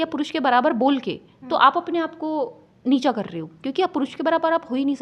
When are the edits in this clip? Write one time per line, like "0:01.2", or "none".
none